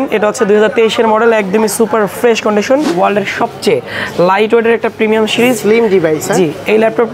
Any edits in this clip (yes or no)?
yes